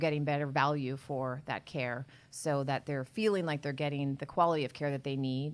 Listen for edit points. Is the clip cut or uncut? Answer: uncut